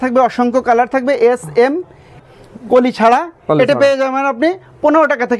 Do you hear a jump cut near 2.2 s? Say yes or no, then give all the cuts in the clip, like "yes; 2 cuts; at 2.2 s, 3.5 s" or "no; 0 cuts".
yes; 1 cut; at 2.2 s